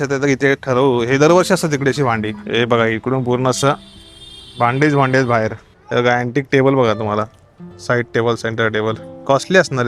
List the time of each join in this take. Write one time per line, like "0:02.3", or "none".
0:02.3
0:05.8